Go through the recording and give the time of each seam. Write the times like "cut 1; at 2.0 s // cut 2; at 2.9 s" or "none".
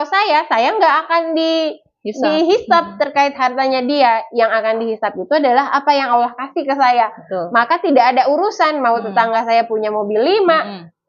none